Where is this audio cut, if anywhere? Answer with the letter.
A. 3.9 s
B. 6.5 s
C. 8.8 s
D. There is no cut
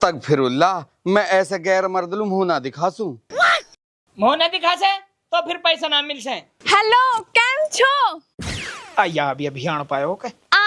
B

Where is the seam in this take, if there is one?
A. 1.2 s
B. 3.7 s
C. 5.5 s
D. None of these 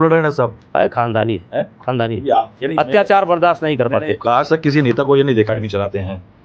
C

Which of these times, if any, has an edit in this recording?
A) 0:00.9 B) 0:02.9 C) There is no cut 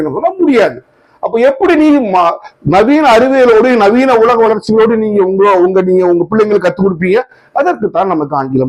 C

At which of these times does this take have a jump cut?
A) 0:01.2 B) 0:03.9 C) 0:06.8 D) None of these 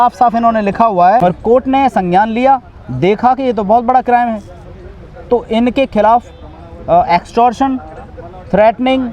A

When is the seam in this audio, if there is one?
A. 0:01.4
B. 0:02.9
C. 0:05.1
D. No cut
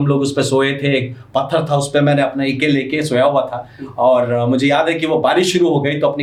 D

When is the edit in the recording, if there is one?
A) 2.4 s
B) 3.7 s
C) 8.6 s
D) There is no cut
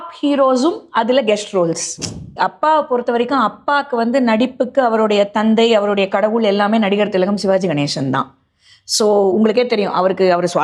A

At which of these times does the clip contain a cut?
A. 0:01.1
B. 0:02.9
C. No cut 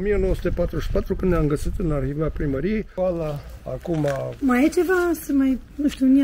B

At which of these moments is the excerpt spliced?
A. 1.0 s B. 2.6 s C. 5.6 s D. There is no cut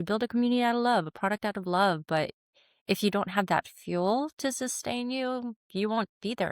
C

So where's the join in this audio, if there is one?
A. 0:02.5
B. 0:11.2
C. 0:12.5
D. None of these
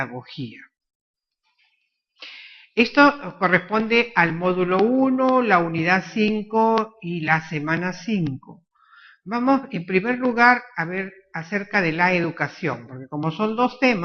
C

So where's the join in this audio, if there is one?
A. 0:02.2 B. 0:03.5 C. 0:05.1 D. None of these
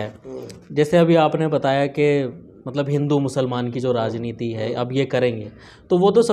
D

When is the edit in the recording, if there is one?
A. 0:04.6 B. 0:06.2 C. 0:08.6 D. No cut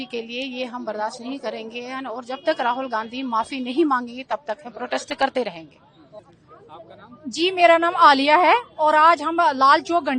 B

